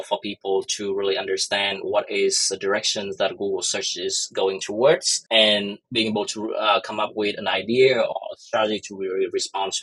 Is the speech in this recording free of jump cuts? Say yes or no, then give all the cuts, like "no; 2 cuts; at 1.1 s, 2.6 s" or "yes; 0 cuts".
yes; 0 cuts